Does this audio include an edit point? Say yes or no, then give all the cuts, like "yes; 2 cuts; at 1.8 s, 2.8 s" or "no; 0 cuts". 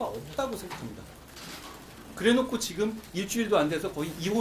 yes; 1 cut; at 2.0 s